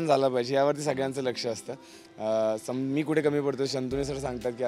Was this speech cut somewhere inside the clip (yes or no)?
no